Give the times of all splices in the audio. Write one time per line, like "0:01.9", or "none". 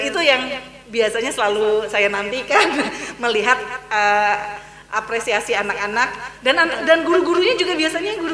0:06.2